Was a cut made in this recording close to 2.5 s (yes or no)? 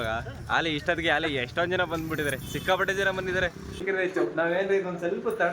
no